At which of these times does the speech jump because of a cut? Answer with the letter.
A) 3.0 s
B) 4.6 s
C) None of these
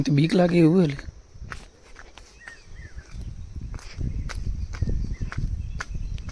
C